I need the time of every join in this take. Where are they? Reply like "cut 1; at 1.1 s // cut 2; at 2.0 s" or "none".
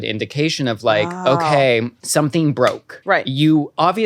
cut 1; at 2.0 s // cut 2; at 2.9 s